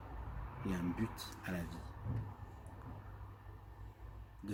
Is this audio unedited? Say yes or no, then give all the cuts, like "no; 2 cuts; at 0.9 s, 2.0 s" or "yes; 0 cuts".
yes; 0 cuts